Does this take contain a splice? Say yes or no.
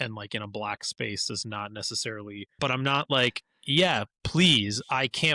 yes